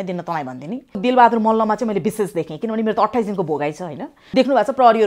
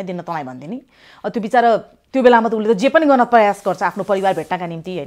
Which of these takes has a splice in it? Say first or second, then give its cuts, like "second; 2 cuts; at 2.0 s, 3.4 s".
first; 2 cuts; at 1.0 s, 4.2 s